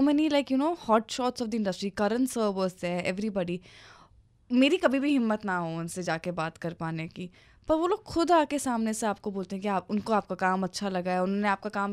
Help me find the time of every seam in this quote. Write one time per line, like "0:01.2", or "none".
none